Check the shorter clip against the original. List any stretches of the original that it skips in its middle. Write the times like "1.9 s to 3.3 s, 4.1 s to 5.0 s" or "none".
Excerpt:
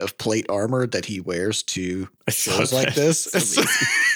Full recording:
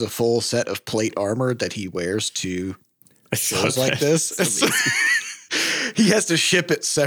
2.8 s to 3.2 s